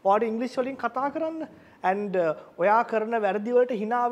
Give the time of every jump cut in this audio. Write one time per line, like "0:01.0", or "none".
none